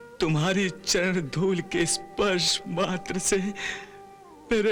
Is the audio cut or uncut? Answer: uncut